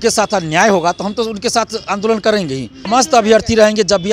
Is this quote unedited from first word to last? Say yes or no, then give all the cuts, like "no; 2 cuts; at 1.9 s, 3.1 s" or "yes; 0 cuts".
no; 1 cut; at 2.9 s